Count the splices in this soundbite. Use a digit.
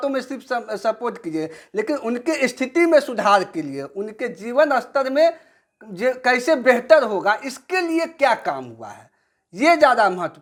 0